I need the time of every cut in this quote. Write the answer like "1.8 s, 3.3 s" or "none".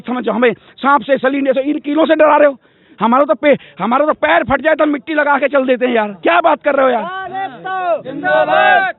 none